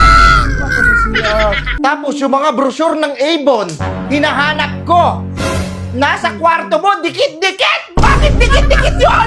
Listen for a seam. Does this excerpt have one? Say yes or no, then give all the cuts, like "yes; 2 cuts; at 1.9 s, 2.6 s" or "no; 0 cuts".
yes; 1 cut; at 1.8 s